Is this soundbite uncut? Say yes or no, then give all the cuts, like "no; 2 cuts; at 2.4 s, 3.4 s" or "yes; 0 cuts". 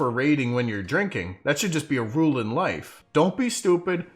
no; 1 cut; at 2.9 s